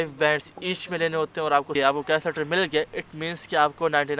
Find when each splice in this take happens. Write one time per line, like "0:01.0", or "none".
0:01.7